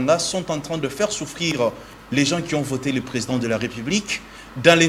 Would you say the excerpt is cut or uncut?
uncut